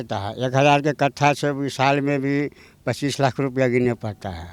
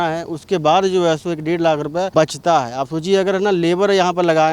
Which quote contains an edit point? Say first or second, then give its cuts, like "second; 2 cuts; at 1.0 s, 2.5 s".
second; 1 cut; at 2.1 s